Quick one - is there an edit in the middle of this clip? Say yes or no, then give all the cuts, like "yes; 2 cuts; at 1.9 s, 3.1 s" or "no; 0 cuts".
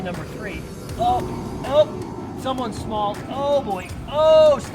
yes; 1 cut; at 0.9 s